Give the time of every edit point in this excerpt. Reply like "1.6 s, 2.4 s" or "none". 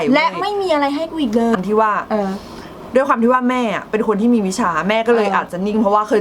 1.6 s